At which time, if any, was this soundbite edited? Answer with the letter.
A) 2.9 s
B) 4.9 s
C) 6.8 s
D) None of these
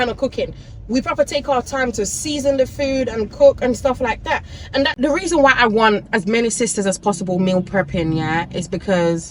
B